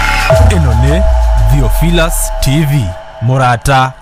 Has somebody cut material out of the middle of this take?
no; 0 cuts

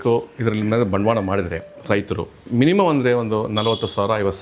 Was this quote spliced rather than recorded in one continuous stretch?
yes; 1 cut; at 2.5 s

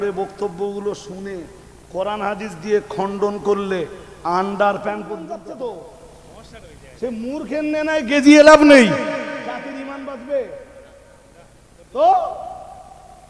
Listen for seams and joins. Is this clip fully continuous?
no; 1 cut; at 5.2 s

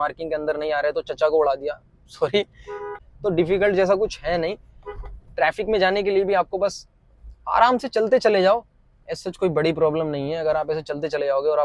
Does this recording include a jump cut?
yes; 1 cut; at 2.9 s

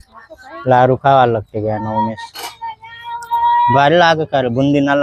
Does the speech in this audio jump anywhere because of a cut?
no; 0 cuts

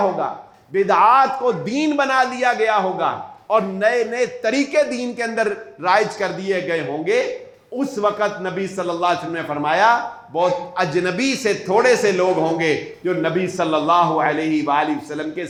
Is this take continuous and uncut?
yes; 0 cuts

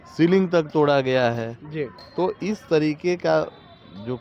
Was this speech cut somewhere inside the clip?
no; 0 cuts

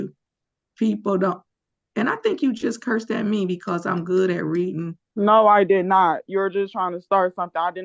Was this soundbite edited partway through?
no; 0 cuts

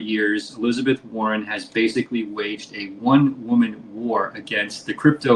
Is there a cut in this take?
no; 0 cuts

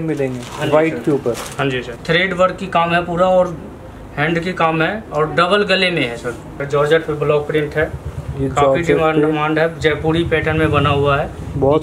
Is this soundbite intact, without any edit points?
no; 2 cuts; at 1.9 s, 6.5 s

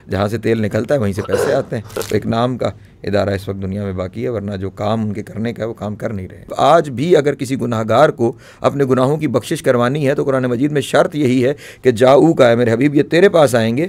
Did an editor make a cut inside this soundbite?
yes; 2 cuts; at 2.0 s, 6.5 s

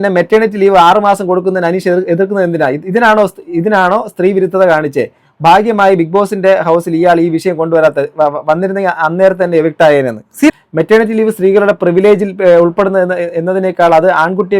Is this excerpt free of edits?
no; 1 cut; at 10.5 s

